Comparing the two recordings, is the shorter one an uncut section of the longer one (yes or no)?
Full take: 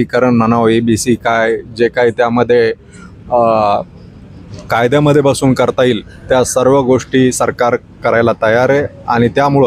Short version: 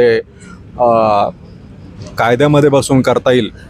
yes